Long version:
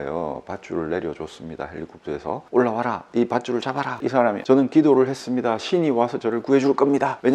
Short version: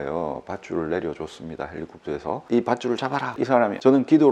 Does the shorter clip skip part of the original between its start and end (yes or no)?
yes